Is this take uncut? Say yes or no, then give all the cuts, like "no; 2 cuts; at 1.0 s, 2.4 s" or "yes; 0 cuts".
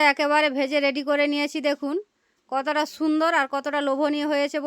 yes; 0 cuts